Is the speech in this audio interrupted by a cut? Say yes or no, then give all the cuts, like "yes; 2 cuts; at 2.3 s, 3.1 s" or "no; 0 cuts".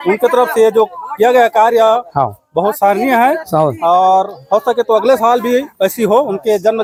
no; 0 cuts